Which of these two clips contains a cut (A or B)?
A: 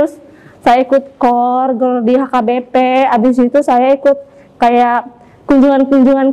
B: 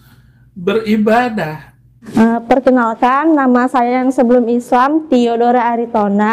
B